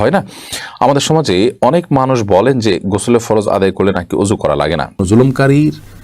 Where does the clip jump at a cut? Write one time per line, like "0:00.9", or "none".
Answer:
0:05.0

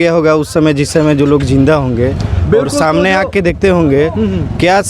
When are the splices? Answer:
none

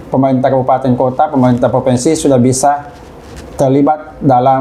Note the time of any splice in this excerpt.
none

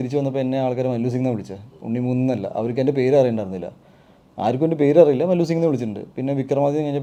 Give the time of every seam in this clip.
none

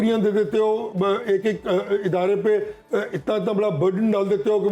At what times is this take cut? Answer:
none

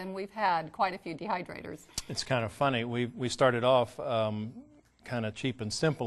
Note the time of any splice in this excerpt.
0:02.7

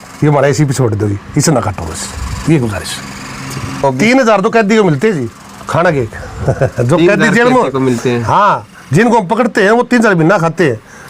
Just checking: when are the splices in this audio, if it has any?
0:03.8

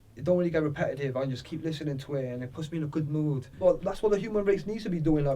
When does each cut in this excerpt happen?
0:03.5

